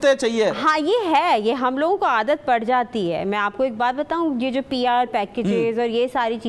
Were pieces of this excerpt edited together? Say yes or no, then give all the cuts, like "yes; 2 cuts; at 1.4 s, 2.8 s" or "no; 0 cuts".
no; 0 cuts